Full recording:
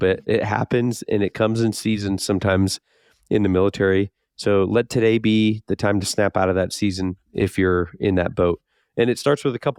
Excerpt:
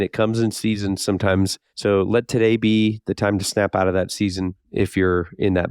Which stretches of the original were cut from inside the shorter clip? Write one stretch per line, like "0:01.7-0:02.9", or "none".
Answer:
0:02.9-0:04.3